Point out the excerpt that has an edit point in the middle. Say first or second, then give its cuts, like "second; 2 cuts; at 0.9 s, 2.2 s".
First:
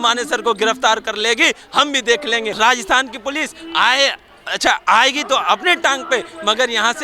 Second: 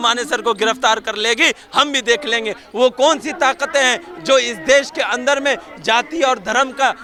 first; 1 cut; at 2.5 s